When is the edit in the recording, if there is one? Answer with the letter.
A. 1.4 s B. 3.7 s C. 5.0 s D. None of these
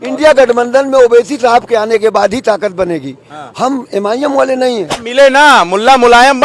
C